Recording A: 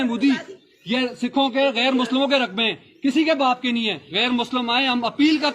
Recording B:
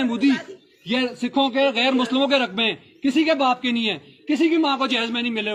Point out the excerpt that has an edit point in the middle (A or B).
A